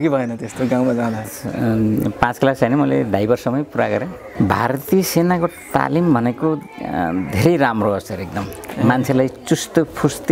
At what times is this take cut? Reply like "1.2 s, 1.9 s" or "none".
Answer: 1.3 s, 4.2 s